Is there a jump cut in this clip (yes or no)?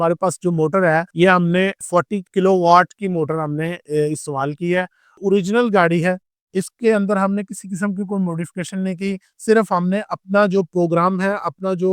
yes